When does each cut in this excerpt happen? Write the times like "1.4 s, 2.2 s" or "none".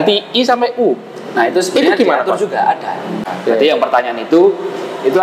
3.1 s